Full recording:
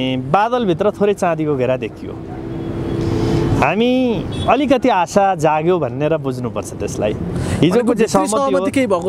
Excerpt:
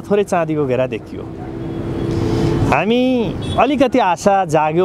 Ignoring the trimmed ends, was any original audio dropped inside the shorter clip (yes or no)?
no